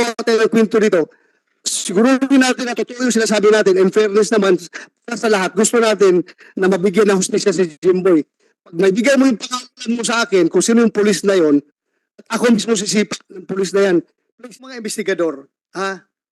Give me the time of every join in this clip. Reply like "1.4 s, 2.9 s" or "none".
14.7 s